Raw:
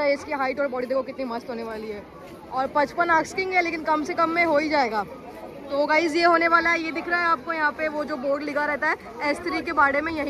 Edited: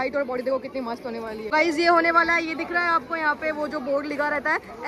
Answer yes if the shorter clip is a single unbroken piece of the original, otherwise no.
no